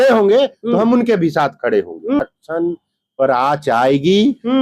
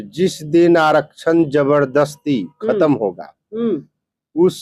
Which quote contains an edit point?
first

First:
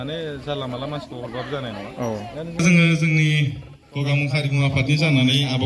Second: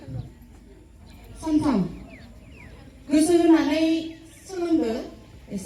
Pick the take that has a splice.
first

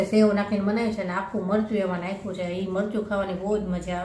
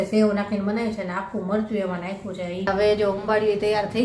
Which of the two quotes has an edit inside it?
second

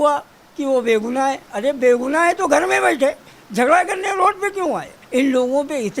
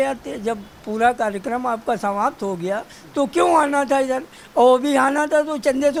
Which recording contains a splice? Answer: first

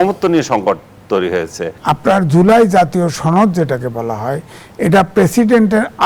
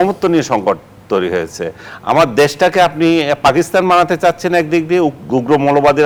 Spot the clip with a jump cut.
first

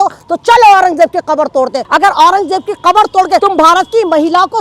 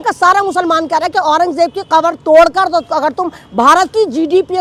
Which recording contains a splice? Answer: first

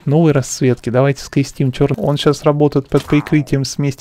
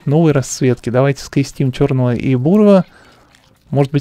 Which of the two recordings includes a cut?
first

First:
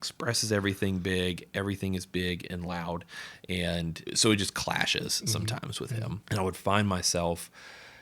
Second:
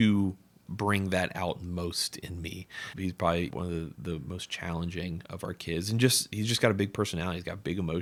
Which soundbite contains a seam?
first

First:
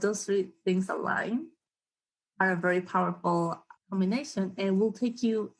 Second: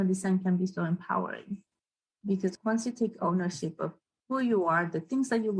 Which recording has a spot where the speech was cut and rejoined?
second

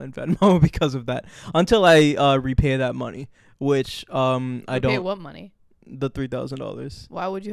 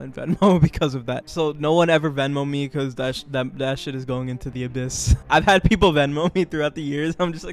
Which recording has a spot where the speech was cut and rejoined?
second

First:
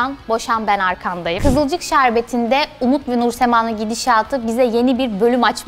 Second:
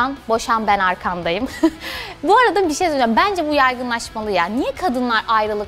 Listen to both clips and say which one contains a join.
first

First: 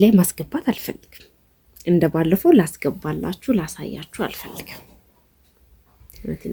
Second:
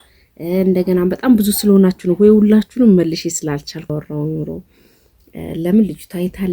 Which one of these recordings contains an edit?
second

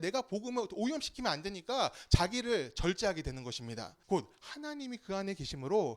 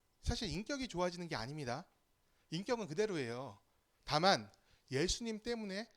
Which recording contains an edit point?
first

